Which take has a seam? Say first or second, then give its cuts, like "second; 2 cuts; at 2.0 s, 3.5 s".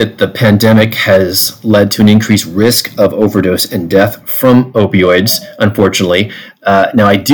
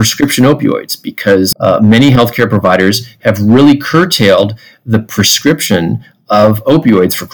second; 1 cut; at 1.5 s